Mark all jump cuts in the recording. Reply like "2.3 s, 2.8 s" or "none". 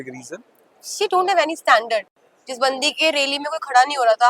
2.1 s